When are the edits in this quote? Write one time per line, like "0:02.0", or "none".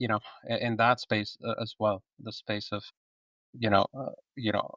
none

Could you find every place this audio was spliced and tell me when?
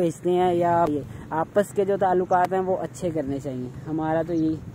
0:00.9

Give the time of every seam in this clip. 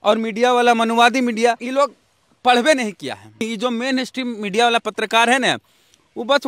0:01.6
0:03.4

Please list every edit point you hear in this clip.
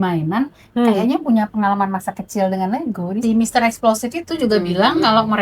0:03.2
0:04.2

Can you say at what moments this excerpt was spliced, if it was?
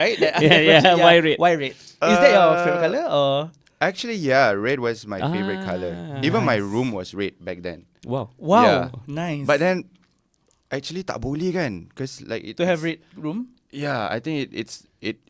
none

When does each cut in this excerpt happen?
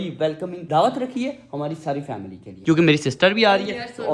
none

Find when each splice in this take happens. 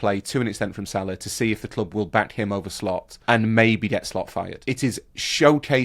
0:03.1
0:04.7

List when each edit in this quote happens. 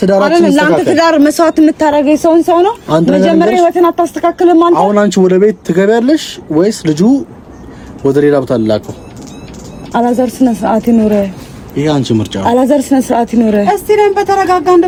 none

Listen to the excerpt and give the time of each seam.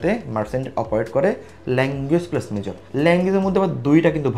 0:02.8

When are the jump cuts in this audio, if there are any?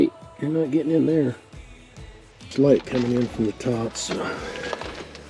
none

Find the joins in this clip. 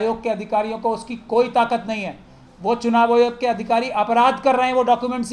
none

